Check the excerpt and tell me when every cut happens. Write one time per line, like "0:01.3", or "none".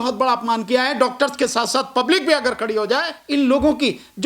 0:03.2